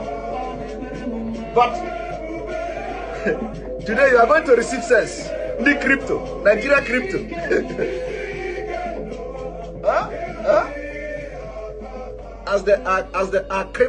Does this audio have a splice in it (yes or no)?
no